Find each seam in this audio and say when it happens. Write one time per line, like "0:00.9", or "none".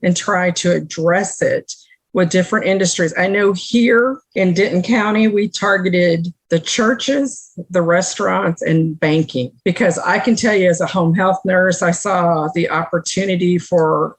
0:06.3
0:09.5